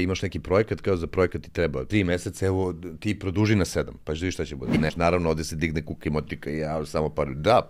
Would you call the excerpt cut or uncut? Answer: cut